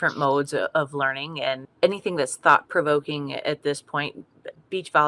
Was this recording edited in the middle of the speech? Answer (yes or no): yes